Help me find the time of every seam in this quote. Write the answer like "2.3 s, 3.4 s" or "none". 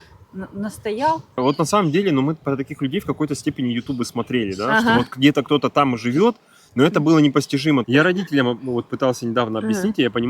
1.4 s, 7.8 s